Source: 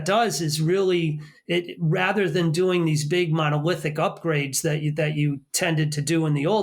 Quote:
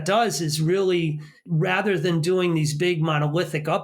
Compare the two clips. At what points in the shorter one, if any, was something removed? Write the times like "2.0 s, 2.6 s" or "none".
1.4 s